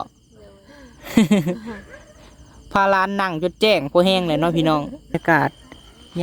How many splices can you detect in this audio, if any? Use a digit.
1